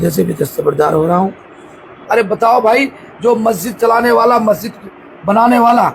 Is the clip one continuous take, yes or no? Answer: no